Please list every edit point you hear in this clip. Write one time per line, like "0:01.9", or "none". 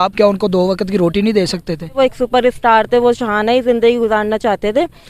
0:02.0